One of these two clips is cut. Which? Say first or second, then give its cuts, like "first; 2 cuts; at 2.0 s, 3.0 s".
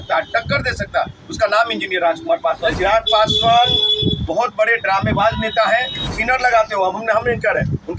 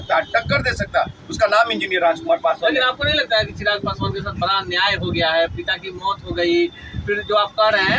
first; 2 cuts; at 2.7 s, 6.1 s